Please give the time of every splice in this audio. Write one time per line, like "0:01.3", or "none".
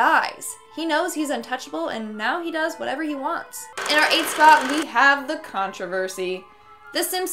0:03.7